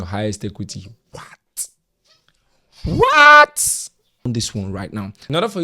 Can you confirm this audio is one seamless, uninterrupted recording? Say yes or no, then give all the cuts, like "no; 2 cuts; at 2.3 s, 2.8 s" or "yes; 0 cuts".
no; 1 cut; at 4.3 s